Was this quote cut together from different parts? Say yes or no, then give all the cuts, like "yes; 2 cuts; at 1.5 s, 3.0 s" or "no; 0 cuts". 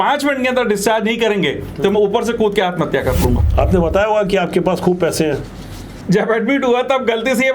yes; 2 cuts; at 3.4 s, 5.9 s